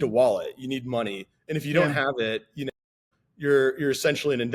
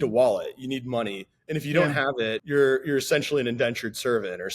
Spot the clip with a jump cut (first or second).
second